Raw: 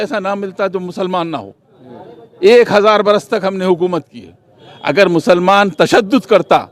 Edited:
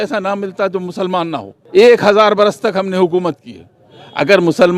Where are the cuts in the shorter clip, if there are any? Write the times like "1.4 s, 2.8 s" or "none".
1.5 s